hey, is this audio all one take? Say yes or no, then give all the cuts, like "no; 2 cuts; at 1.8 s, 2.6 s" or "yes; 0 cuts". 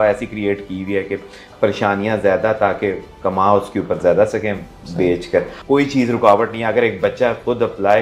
no; 1 cut; at 5.6 s